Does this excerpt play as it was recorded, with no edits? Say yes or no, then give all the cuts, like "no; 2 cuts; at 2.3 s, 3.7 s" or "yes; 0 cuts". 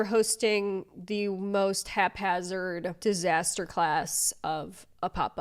no; 1 cut; at 3.0 s